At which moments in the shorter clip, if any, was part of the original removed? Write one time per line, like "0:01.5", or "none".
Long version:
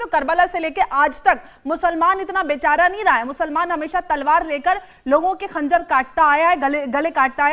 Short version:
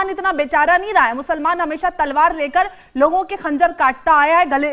none